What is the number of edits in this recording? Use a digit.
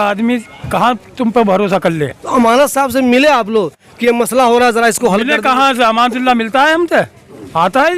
0